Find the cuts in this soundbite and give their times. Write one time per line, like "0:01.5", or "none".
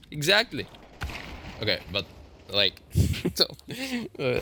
none